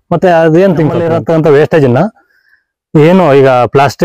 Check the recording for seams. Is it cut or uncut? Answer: cut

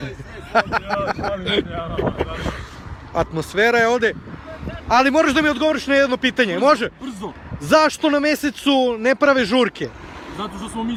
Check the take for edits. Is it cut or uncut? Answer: uncut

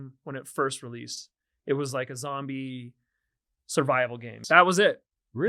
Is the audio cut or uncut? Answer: cut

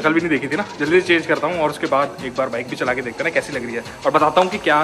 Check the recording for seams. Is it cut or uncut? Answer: uncut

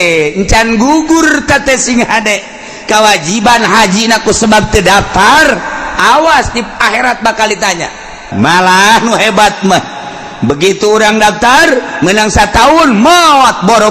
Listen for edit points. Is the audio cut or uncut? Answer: cut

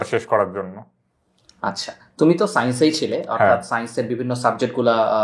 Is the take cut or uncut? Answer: uncut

